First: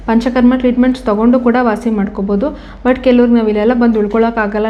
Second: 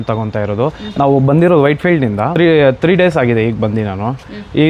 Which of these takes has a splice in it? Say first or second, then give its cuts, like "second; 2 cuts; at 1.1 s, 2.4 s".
second; 1 cut; at 2.3 s